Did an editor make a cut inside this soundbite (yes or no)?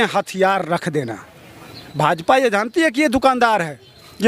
yes